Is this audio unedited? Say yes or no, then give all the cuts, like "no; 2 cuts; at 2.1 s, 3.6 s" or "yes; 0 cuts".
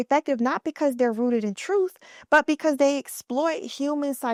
yes; 0 cuts